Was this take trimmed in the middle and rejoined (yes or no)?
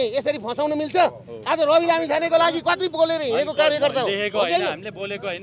no